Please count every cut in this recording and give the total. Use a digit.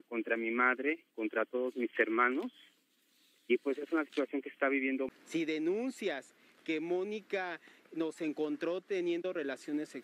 1